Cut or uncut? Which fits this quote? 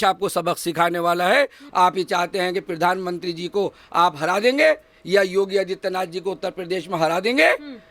cut